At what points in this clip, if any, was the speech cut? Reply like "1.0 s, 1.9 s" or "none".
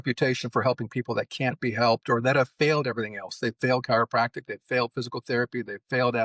none